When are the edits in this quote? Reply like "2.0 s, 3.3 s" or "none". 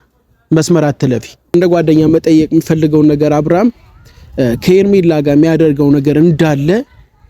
1.5 s

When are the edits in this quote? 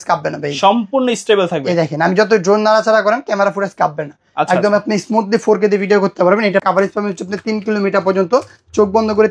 6.6 s

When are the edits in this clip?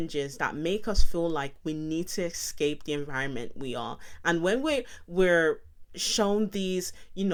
none

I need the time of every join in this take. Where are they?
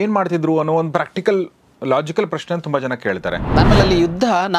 3.5 s

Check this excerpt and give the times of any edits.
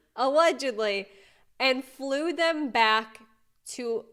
none

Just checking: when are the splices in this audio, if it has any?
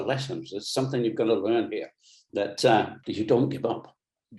3.0 s

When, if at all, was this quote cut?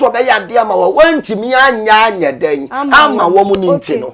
none

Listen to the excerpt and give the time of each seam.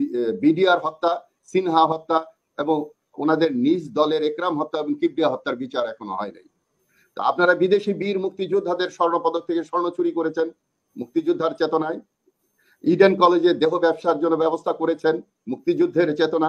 none

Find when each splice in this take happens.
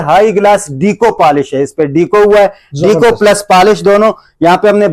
none

